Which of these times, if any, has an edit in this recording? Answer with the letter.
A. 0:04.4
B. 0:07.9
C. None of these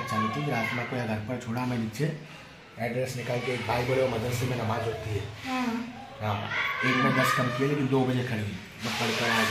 C